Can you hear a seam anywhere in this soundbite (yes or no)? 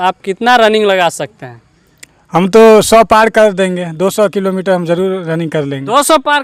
no